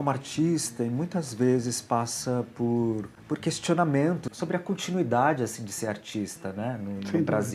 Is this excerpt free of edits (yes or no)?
no